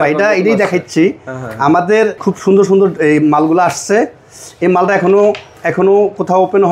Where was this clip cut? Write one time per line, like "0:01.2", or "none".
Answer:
0:02.2